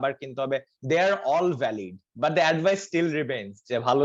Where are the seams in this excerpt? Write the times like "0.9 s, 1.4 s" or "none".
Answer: 2.0 s